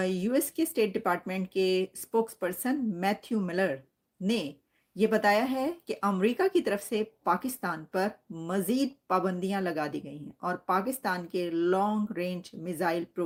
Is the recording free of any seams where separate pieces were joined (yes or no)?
yes